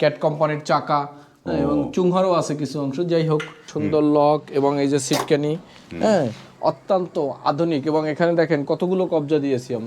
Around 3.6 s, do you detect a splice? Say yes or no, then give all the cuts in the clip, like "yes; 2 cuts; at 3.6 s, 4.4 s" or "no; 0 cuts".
yes; 1 cut; at 3.6 s